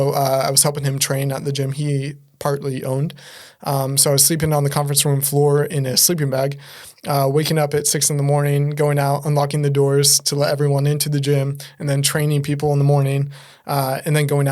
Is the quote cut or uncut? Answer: uncut